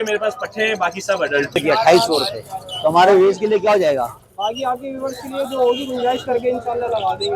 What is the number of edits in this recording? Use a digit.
1